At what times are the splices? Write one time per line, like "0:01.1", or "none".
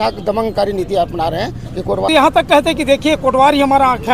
0:02.1